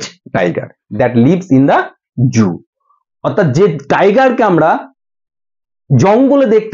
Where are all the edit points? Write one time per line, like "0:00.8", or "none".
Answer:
none

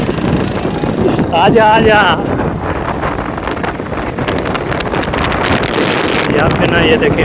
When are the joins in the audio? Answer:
none

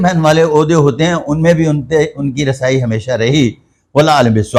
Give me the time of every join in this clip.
none

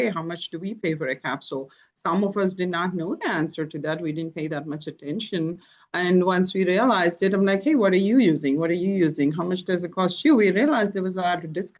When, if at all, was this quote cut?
none

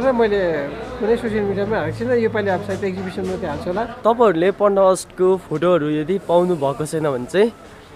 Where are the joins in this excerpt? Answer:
0:04.0

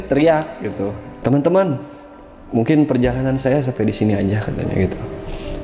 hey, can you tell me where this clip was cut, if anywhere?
0:01.2

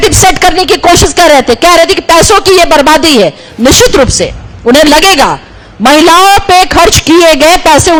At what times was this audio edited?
none

